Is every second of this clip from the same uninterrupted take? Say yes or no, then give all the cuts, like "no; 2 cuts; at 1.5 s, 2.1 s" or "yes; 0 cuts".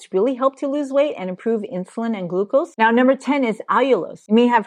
no; 1 cut; at 2.7 s